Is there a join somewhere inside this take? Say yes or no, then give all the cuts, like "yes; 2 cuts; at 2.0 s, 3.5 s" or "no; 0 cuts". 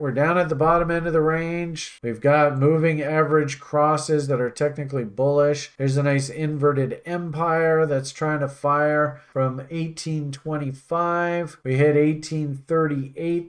yes; 1 cut; at 2.0 s